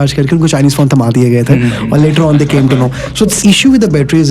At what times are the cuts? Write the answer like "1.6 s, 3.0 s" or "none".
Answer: 3.4 s

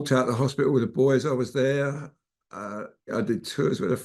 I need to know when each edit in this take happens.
3.1 s

